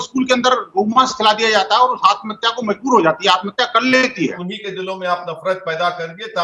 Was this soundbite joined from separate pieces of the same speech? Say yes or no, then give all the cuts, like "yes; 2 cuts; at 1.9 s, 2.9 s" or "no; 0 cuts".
yes; 1 cut; at 4.5 s